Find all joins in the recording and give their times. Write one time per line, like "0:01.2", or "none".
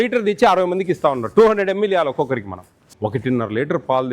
0:02.8

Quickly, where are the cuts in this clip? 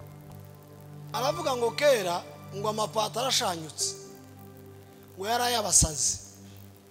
0:01.1

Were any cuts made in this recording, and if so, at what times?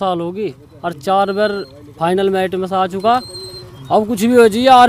none

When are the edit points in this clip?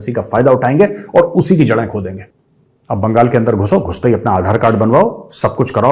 0:02.2

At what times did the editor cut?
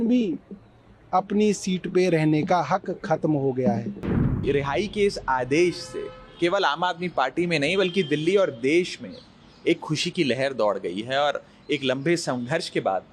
0:04.4

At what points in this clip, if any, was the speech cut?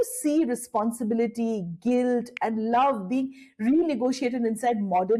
none

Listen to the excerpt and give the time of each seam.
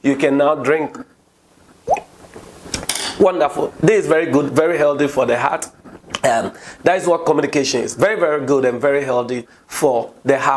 none

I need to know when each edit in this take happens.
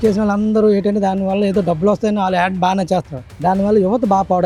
none

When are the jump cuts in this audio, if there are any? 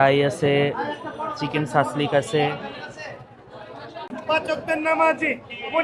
0:04.1

